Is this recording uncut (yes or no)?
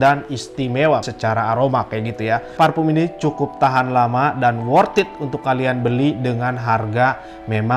no